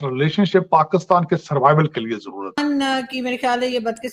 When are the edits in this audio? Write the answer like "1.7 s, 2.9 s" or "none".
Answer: 2.6 s